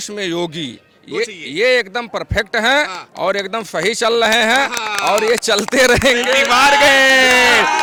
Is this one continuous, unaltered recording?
yes; 0 cuts

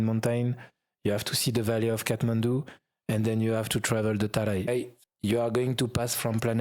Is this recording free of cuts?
no; 1 cut; at 4.7 s

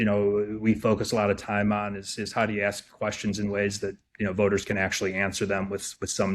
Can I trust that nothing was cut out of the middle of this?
yes; 0 cuts

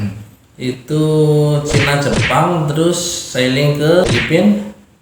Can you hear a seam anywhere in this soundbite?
no; 0 cuts

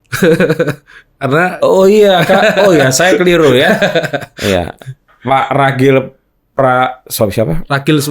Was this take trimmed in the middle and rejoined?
no; 0 cuts

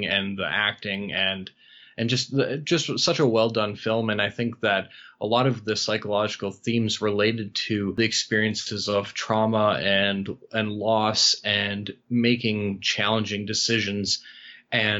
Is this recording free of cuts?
no; 1 cut; at 7.9 s

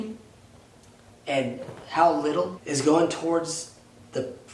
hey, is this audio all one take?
no; 1 cut; at 2.6 s

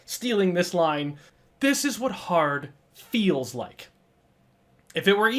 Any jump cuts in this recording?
yes; 1 cut; at 1.2 s

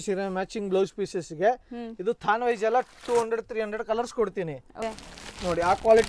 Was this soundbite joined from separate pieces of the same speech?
yes; 1 cut; at 4.7 s

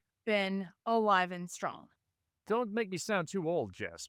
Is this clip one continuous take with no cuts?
yes; 0 cuts

